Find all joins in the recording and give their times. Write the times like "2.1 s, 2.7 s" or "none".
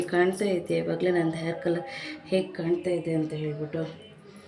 none